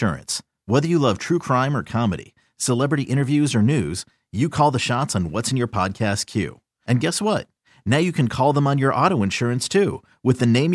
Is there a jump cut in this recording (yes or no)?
no